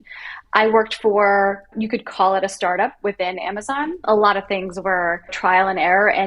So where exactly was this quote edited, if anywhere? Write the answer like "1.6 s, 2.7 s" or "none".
4.0 s, 5.4 s